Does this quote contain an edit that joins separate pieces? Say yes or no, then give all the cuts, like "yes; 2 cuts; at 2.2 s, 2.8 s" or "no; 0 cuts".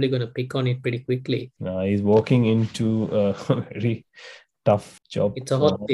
yes; 2 cuts; at 1.5 s, 4.9 s